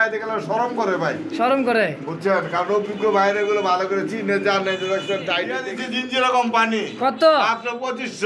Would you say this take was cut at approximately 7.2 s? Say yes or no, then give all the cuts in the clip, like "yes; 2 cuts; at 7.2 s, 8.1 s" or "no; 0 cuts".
no; 1 cut; at 5.6 s